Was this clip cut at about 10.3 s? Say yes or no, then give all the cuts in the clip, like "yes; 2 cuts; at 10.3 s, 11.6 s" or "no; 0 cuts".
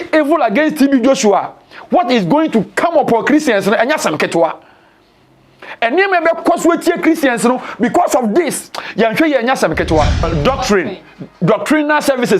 yes; 1 cut; at 10.3 s